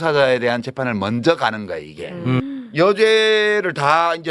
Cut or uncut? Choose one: cut